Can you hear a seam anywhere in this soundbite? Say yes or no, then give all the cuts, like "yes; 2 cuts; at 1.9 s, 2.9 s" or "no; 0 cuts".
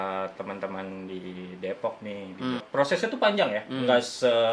yes; 1 cut; at 2.6 s